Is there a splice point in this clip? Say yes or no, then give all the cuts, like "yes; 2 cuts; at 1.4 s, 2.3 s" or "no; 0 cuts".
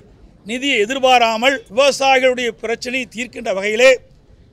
yes; 1 cut; at 1.6 s